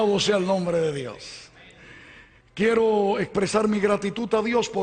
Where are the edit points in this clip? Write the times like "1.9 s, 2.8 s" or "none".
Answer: none